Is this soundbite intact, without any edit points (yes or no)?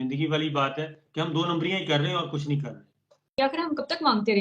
no